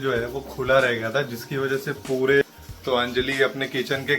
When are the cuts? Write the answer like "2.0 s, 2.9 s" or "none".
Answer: 2.4 s